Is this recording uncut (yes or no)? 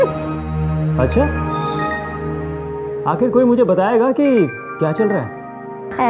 yes